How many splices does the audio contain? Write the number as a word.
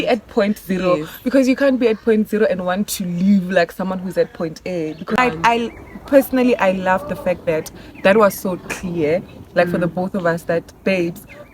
one